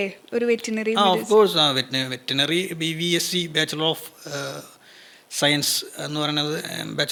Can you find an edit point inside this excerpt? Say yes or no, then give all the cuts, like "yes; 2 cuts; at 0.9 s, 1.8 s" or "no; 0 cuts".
no; 0 cuts